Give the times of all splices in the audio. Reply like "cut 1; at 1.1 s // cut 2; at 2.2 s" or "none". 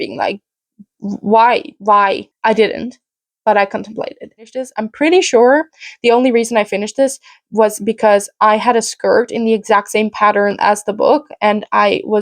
cut 1; at 4.8 s